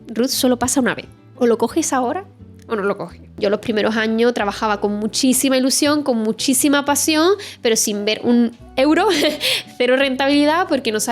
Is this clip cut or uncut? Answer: cut